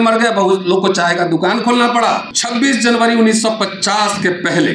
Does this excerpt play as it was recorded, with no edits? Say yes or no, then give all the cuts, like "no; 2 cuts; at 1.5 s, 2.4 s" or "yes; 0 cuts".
no; 1 cut; at 2.3 s